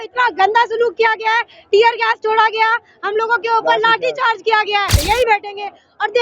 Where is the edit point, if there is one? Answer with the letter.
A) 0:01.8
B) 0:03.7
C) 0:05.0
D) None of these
C